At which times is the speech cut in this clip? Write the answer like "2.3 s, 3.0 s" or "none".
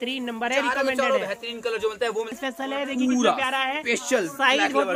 2.3 s